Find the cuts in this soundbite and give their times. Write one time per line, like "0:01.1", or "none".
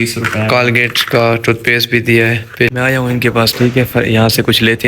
0:02.7

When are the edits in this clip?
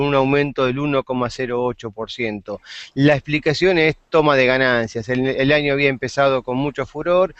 none

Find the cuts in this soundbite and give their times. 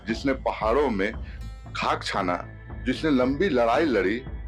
none

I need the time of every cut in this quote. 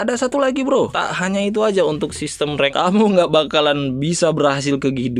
0:01.0
0:02.7

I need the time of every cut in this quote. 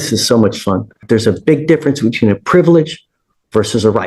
0:01.0

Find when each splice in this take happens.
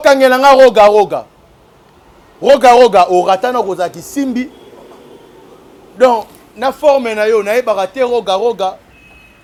none

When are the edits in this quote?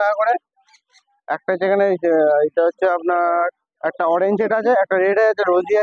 none

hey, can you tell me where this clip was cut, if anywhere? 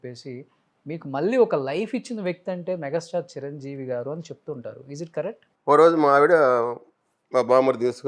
0:05.5

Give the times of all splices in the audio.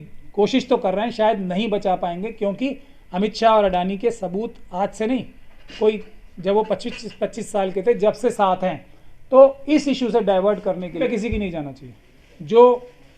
0:11.0

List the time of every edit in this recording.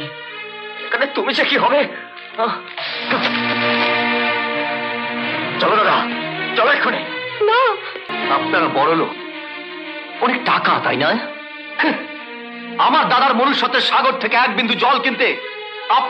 0:08.1

